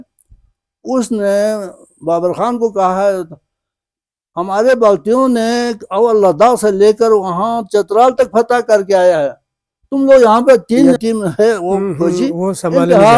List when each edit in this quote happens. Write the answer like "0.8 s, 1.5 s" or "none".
11.0 s

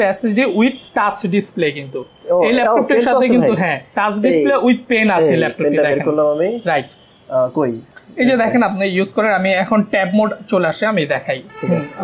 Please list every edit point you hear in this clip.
none

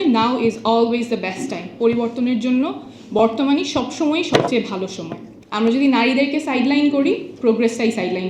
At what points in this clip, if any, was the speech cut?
5.4 s

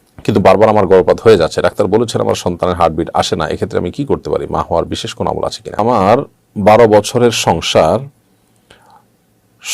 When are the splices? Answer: 5.9 s

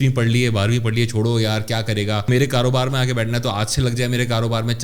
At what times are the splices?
2.3 s

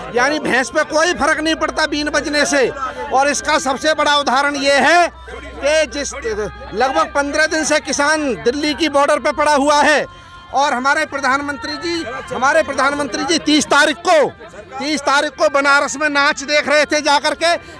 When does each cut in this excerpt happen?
none

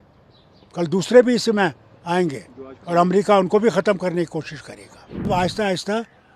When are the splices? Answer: 5.3 s

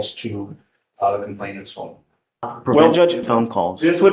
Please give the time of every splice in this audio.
2.5 s

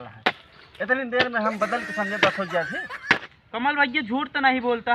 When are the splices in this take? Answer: 3.4 s

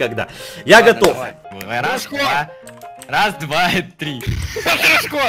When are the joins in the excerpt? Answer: 1.5 s

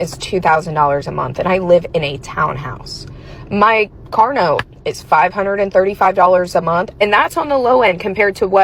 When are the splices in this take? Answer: none

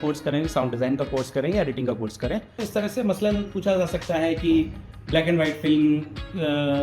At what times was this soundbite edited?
2.7 s

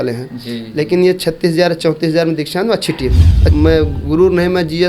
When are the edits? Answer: 3.4 s

